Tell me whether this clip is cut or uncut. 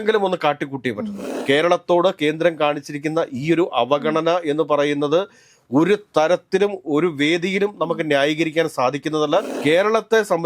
cut